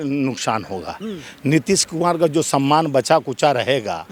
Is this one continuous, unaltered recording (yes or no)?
yes